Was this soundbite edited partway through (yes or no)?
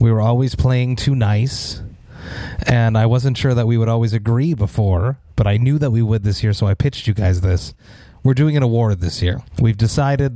yes